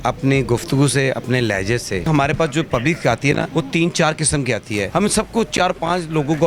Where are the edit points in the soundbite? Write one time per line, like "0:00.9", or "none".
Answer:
0:02.1
0:03.5
0:04.9